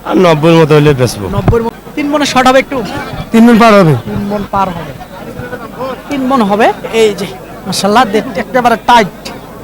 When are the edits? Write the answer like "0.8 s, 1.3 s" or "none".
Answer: 1.7 s